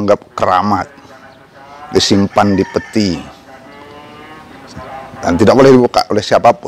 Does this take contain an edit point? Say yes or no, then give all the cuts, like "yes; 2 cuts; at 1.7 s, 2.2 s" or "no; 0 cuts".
no; 0 cuts